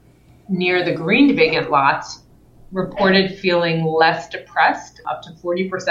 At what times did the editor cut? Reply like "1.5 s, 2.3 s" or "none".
4.9 s